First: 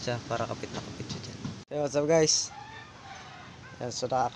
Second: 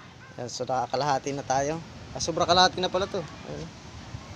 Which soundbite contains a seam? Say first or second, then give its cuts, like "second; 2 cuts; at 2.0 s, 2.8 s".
first; 1 cut; at 1.6 s